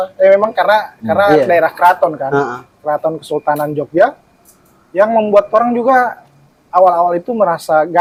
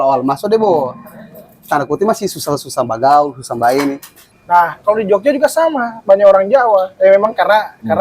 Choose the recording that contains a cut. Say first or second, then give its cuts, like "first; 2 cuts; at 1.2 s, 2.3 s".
second; 1 cut; at 4.3 s